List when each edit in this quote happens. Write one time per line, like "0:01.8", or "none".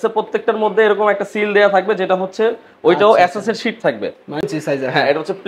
0:04.4